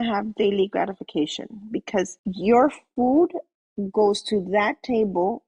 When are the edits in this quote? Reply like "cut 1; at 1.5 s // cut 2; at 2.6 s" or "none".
cut 1; at 2.2 s